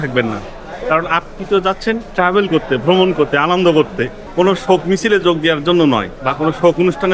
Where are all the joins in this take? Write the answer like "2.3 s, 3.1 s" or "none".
4.2 s, 6.2 s